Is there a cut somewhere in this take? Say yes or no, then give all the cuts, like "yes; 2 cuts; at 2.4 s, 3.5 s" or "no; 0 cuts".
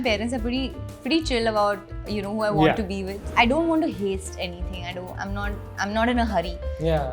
yes; 1 cut; at 3.1 s